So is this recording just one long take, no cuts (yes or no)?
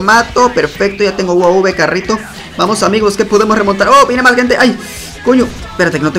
yes